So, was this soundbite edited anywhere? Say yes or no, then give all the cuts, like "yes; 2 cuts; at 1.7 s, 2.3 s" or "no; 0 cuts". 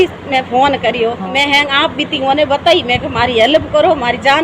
yes; 1 cut; at 1.3 s